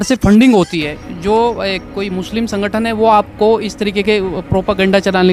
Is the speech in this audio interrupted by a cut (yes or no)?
no